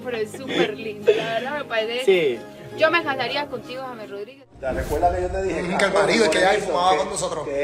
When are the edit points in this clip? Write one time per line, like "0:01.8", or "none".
0:04.3